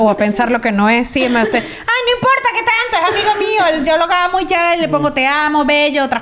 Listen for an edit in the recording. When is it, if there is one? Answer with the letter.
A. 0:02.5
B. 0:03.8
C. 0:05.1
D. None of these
D